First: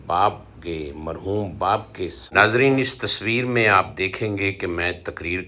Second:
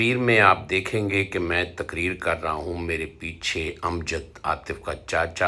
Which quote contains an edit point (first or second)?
first